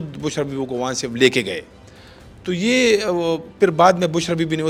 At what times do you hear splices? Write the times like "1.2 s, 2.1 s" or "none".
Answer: none